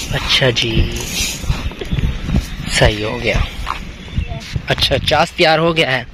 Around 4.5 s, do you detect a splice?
yes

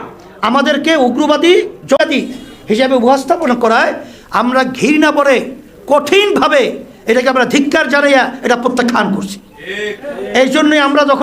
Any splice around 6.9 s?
no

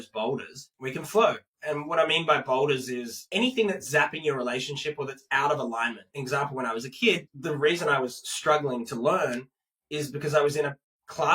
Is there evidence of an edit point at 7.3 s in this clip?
yes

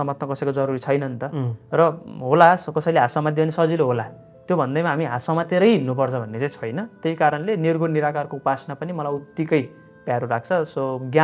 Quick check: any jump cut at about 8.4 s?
no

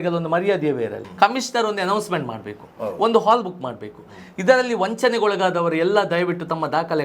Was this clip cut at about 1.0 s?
yes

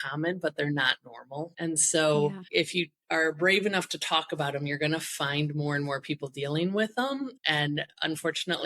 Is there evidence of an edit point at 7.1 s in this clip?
no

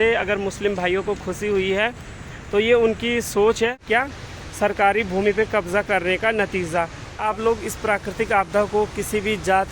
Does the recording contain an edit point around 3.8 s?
yes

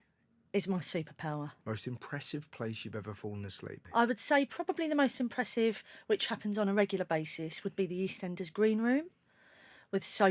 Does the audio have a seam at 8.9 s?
no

